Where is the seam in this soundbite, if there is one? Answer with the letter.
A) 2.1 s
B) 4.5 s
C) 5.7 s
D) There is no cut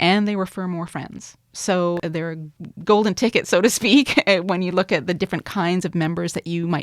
A